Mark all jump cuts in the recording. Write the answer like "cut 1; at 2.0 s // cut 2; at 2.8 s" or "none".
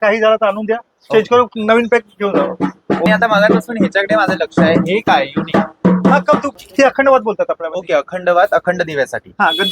cut 1; at 3.1 s // cut 2; at 6.5 s